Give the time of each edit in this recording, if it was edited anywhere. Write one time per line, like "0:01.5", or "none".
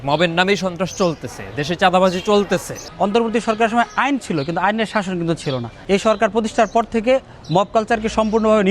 0:02.8
0:05.7